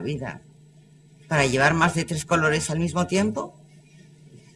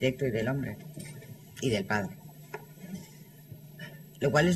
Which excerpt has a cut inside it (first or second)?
first